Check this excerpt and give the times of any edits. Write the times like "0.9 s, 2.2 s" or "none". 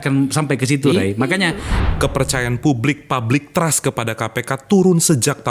1.7 s